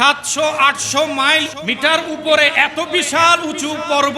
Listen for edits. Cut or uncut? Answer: cut